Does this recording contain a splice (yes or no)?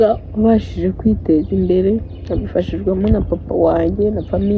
no